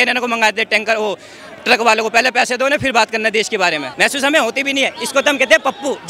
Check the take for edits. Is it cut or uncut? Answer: cut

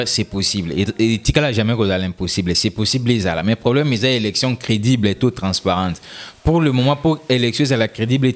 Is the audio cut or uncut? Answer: uncut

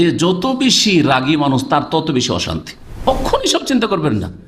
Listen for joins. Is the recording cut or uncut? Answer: cut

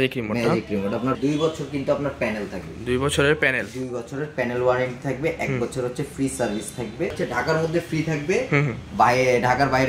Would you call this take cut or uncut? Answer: cut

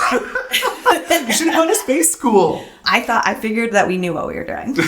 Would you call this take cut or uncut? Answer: cut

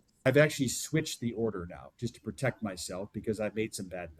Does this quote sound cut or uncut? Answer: uncut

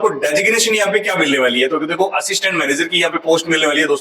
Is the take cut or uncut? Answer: uncut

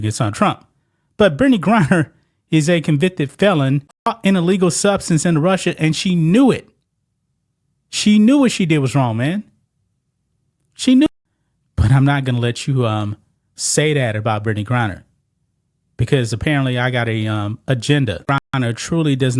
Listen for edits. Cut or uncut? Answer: cut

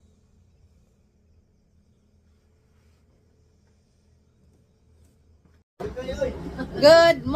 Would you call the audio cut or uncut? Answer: cut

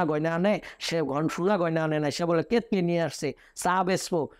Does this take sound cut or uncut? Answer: uncut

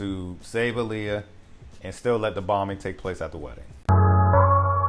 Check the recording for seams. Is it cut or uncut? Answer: cut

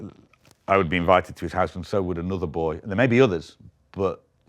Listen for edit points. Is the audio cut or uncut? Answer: uncut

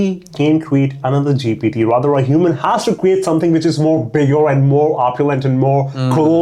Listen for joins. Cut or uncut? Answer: uncut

